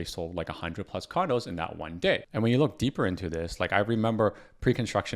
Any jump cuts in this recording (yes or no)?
yes